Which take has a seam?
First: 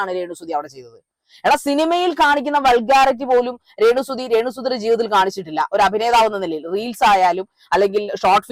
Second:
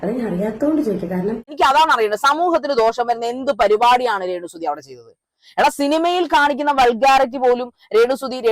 second; 1 cut; at 1.5 s

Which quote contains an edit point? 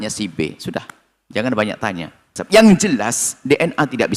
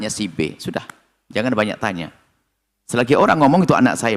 first; 1 cut; at 2.4 s

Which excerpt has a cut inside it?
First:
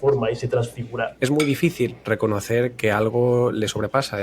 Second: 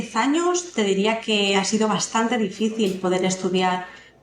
first; 2 cuts; at 1.1 s, 2.0 s

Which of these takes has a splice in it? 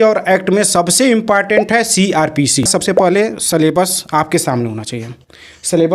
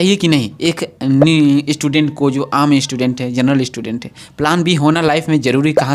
first; 1 cut; at 2.7 s

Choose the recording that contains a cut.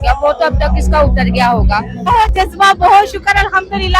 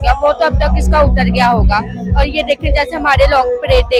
first; 1 cut; at 2.1 s

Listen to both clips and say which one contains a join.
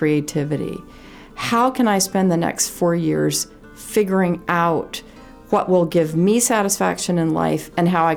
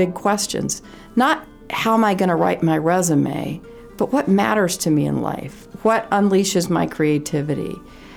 second; 1 cut; at 1.5 s

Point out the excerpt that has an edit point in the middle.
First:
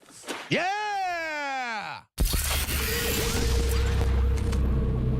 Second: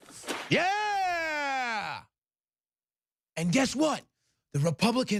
first; 1 cut; at 2.4 s

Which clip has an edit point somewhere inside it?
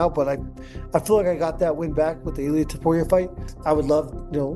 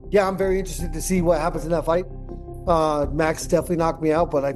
first; 1 cut; at 3.5 s

